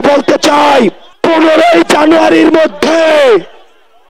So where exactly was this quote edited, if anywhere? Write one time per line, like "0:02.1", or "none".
0:01.1